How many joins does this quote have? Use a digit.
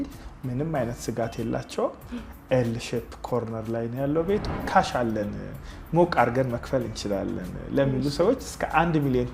1